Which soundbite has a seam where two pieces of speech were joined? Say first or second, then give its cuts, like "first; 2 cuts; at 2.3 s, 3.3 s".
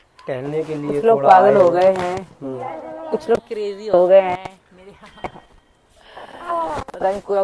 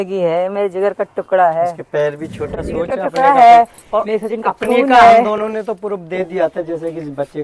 second; 1 cut; at 2.5 s